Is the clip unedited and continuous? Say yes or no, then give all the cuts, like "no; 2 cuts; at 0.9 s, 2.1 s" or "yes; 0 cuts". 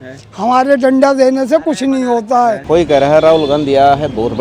no; 1 cut; at 2.6 s